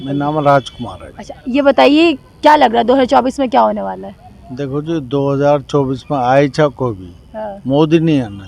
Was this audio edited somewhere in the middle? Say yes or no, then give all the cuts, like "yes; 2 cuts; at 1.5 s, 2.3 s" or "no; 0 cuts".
no; 0 cuts